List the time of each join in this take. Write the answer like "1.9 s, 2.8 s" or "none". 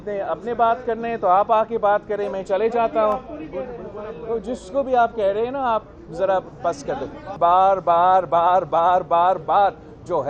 7.3 s